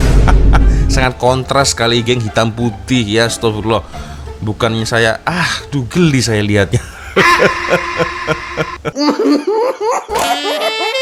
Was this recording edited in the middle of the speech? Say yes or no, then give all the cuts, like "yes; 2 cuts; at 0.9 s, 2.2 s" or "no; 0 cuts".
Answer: no; 0 cuts